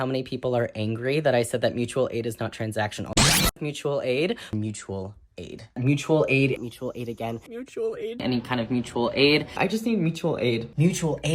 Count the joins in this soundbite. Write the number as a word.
one